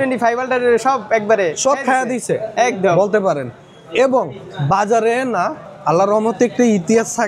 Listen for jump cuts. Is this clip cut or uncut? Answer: uncut